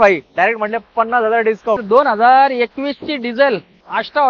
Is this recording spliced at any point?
yes; 1 cut; at 1.8 s

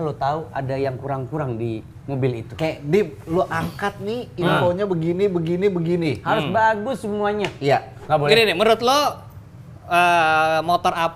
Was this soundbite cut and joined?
yes; 1 cut; at 7.9 s

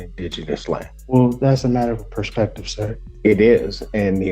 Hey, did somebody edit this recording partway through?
yes; 2 cuts; at 0.9 s, 3.0 s

